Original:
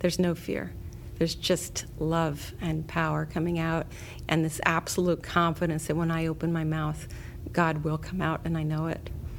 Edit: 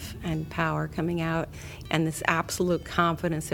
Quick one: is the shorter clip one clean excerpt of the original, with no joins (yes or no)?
yes